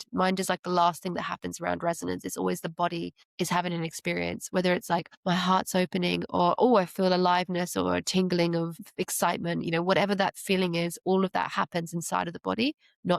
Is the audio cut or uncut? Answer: cut